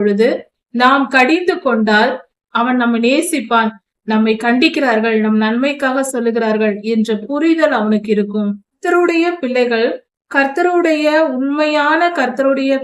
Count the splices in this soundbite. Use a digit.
2